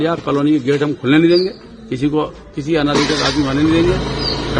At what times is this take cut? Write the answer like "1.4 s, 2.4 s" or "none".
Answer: none